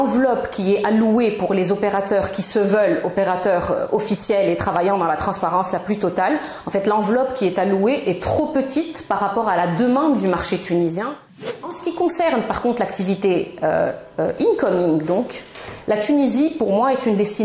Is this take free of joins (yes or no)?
no